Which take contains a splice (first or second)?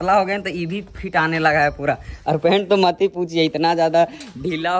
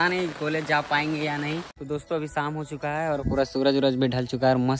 second